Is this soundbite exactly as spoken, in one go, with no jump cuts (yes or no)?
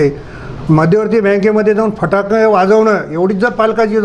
yes